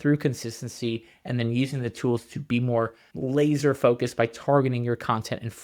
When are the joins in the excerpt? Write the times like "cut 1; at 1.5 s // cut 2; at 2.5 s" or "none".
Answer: cut 1; at 3.0 s